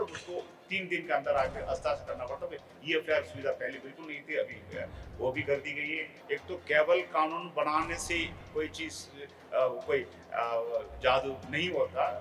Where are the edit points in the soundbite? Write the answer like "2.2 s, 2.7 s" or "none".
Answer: 6.1 s